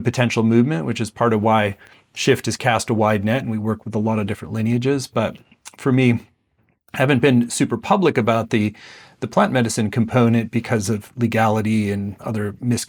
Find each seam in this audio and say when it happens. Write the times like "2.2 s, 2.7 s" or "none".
none